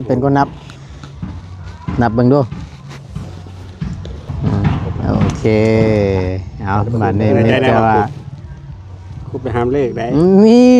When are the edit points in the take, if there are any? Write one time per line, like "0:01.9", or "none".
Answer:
0:04.6